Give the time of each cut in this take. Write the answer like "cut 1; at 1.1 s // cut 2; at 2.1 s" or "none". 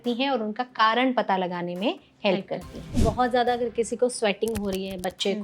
cut 1; at 3.0 s